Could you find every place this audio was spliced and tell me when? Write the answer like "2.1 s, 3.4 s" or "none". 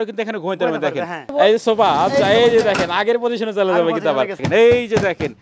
1.3 s, 4.4 s